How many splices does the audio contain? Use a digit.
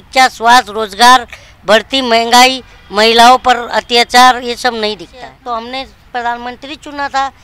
1